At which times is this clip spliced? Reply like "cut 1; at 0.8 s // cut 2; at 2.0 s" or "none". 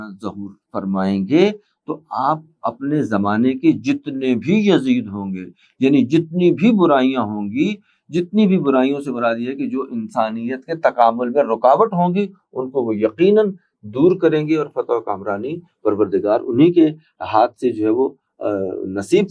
none

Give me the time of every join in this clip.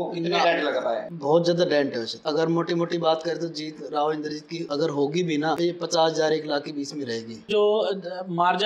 cut 1; at 1.1 s // cut 2; at 2.1 s // cut 3; at 4.6 s // cut 4; at 5.6 s // cut 5; at 7.4 s

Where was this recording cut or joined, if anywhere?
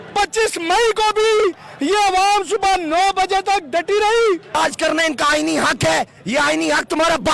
cut 1; at 4.5 s

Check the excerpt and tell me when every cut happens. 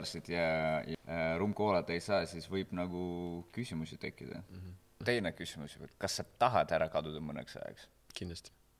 cut 1; at 0.9 s // cut 2; at 5.0 s

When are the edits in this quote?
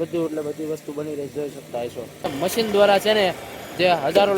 cut 1; at 2.3 s

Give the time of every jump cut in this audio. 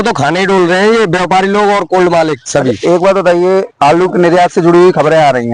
none

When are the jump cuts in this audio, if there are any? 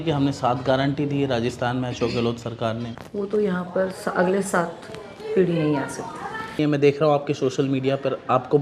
cut 1; at 3.0 s // cut 2; at 6.6 s

